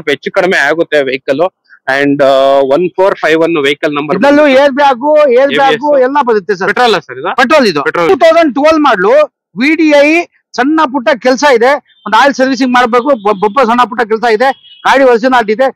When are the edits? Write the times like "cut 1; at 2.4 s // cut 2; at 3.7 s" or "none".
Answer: cut 1; at 8.1 s